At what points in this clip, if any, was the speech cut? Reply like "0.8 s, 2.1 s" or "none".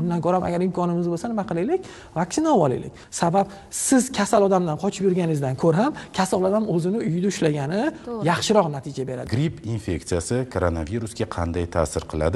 3.0 s, 9.3 s

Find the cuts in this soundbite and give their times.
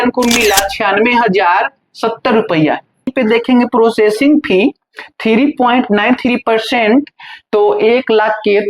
3.1 s

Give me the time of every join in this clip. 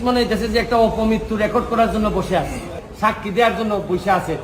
2.8 s

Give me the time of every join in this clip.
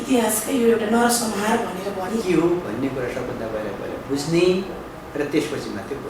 2.2 s

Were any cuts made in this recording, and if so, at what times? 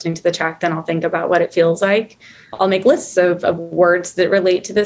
2.5 s

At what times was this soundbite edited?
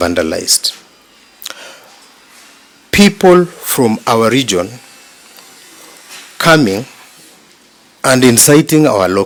none

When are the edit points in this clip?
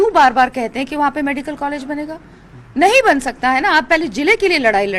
none

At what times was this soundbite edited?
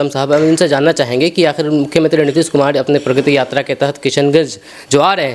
none

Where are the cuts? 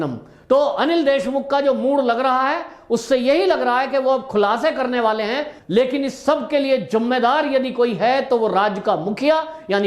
5.5 s

